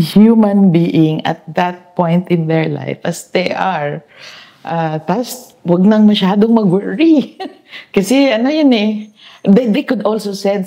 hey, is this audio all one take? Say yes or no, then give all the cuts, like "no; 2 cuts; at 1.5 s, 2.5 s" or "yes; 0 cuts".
yes; 0 cuts